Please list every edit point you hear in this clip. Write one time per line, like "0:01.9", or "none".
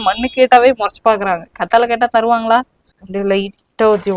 0:03.0